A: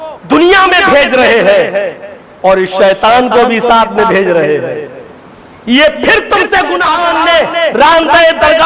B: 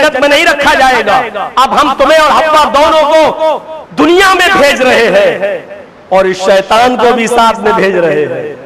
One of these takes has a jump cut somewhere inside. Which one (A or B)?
A